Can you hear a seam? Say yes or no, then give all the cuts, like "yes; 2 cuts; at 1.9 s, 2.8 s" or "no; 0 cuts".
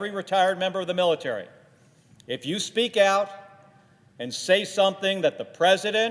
no; 0 cuts